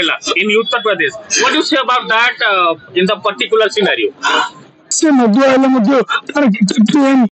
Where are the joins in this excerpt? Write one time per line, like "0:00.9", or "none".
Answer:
0:04.8